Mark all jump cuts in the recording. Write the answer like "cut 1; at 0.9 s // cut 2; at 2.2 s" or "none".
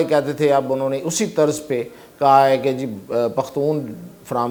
none